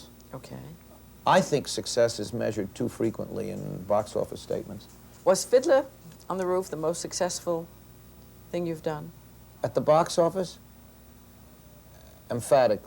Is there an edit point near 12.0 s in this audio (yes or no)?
no